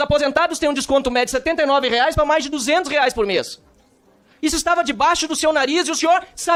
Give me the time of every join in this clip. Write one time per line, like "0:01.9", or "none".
none